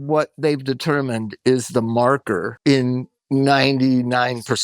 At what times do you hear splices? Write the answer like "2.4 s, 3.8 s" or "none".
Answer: 2.5 s